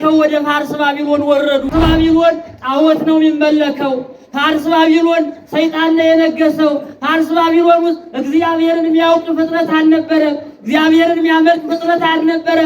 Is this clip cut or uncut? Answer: cut